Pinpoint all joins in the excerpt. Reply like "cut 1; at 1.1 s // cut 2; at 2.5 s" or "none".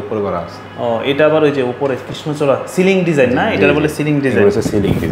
none

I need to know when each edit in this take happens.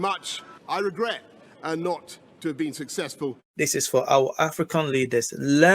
cut 1; at 3.5 s

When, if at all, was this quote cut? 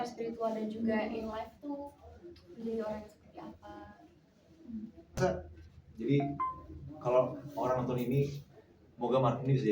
cut 1; at 5.2 s

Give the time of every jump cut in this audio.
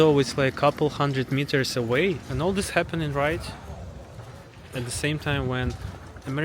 cut 1; at 2.3 s

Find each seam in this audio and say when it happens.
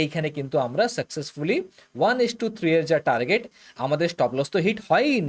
cut 1; at 3.6 s

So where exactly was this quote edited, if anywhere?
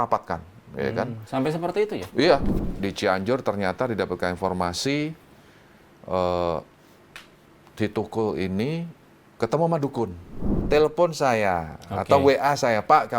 cut 1; at 2.6 s // cut 2; at 10.5 s

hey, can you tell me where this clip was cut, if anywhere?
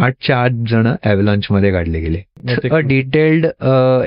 cut 1; at 2.5 s

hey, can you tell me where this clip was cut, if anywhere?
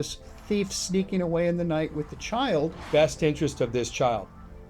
cut 1; at 2.8 s

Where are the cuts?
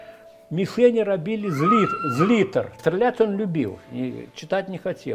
cut 1; at 2.7 s

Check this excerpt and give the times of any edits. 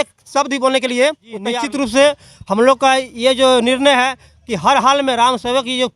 cut 1; at 1.5 s

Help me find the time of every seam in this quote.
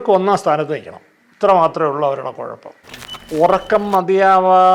cut 1; at 3.3 s

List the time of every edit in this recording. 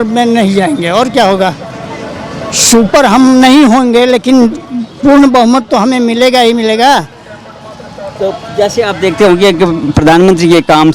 none

